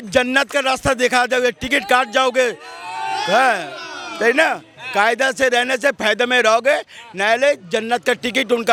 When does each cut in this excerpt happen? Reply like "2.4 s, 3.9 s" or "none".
none